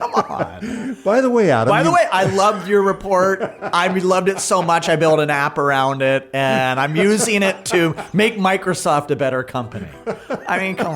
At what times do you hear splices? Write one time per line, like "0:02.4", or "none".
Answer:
none